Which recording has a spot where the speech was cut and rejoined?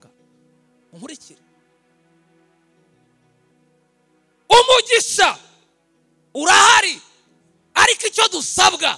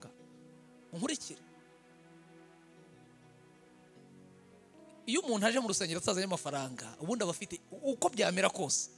first; 1 cut; at 3.5 s

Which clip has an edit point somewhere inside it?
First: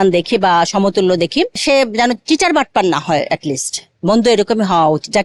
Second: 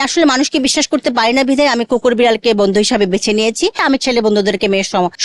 second; 1 cut; at 3.8 s

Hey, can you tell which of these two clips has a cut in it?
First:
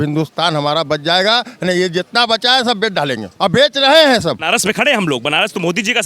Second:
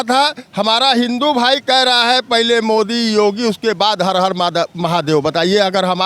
first; 2 cuts; at 3.3 s, 4.4 s

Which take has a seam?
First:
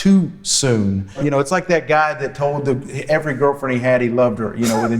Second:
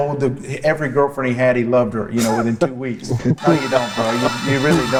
first; 1 cut; at 1.2 s

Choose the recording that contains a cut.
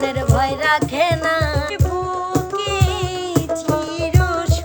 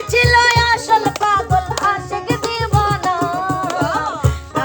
first; 1 cut; at 1.7 s

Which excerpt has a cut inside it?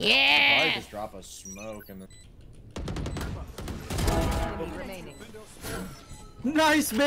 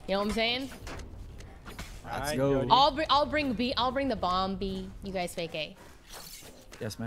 first; 1 cut; at 2.1 s

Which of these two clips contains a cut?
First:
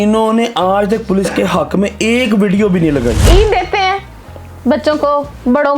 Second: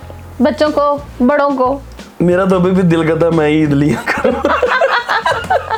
first; 1 cut; at 3.2 s

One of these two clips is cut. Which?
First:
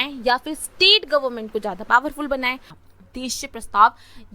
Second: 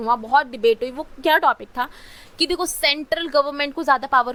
first; 1 cut; at 2.6 s

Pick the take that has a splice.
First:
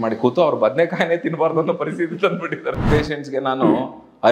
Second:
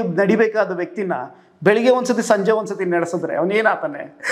first; 1 cut; at 2.9 s

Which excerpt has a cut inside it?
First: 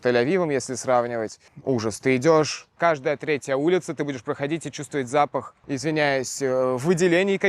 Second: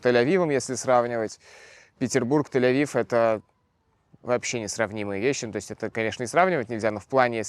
first; 2 cuts; at 1.4 s, 2.7 s

